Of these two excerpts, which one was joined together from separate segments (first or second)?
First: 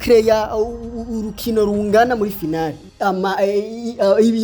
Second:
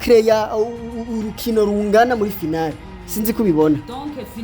first